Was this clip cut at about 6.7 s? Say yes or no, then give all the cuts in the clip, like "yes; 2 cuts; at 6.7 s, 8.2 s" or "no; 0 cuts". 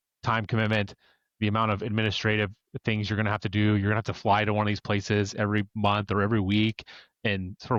no; 0 cuts